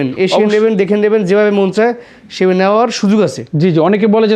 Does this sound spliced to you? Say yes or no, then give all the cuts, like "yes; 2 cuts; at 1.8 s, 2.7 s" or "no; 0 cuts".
no; 0 cuts